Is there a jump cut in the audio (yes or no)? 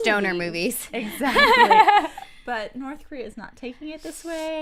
no